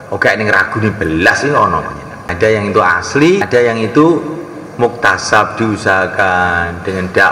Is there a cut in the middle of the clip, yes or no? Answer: yes